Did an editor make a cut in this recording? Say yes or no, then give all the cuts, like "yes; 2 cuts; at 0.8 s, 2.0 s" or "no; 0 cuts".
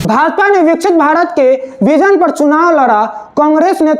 no; 0 cuts